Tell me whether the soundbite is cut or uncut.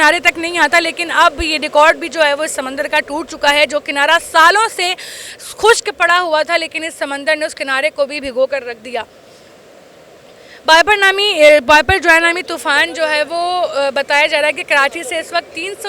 uncut